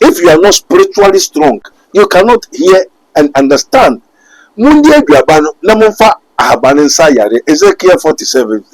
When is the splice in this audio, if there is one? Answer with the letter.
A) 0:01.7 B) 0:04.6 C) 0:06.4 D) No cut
A